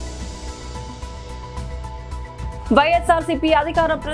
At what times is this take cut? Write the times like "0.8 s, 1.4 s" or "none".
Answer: 1.4 s, 2.5 s